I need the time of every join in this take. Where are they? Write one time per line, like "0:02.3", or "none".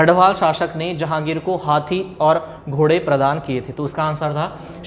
none

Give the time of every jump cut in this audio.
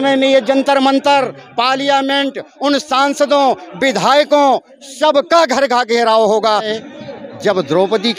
0:06.8

